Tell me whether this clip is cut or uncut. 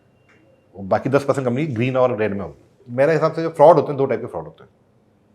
cut